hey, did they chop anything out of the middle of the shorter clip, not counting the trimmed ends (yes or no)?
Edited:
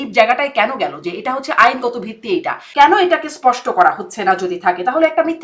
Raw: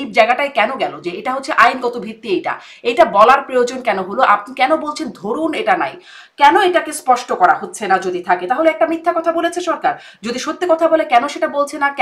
yes